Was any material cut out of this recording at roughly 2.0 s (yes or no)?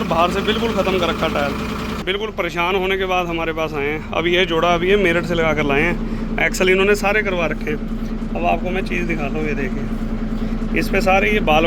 yes